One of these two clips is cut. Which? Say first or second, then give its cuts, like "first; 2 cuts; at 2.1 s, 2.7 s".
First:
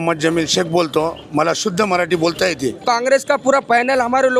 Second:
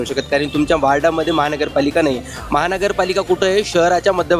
first; 1 cut; at 2.8 s